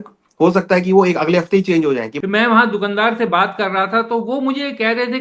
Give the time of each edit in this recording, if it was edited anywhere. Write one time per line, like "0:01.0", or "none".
0:02.1